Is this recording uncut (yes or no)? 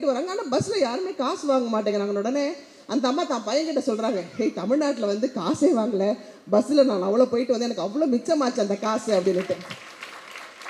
yes